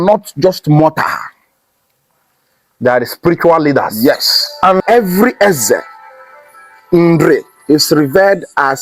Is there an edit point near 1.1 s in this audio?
no; 1 cut; at 4.8 s

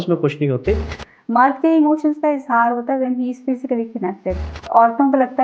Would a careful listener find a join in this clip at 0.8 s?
yes; 2 cuts; at 0.8 s, 4.5 s

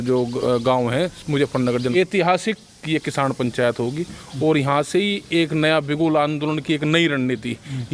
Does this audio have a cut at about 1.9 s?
yes; 1 cut; at 1.9 s

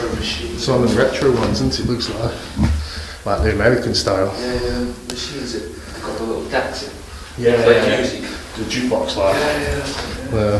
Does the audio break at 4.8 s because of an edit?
no; 0 cuts

